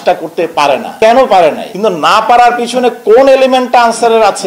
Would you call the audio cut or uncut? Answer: cut